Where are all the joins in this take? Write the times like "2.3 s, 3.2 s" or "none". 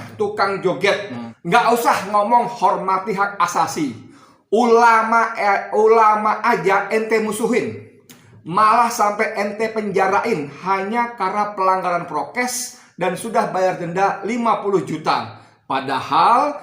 1.2 s